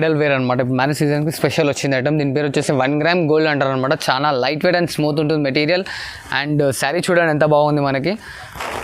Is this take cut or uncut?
uncut